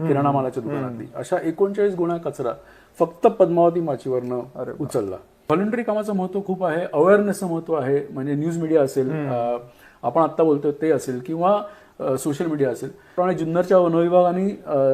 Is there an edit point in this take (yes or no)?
yes